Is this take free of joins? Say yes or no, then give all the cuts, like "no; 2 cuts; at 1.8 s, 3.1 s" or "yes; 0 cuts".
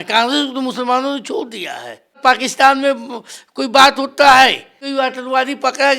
no; 2 cuts; at 2.2 s, 4.8 s